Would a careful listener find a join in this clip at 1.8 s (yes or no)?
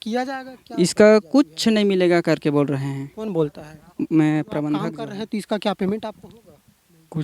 no